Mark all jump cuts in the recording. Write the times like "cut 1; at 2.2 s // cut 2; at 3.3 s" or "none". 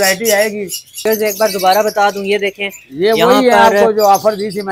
cut 1; at 1.0 s

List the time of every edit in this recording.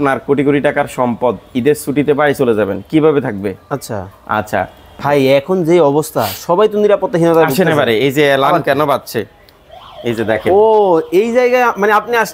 cut 1; at 4.9 s

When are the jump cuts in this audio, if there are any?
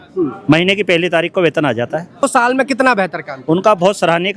cut 1; at 2.3 s

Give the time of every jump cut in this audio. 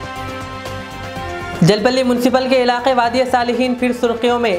cut 1; at 1.5 s

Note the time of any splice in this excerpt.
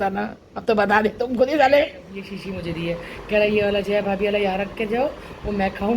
cut 1; at 2.3 s

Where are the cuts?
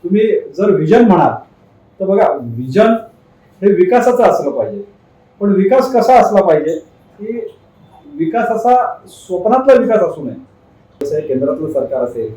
cut 1; at 11.0 s

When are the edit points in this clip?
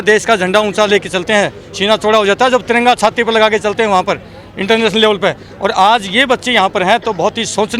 none

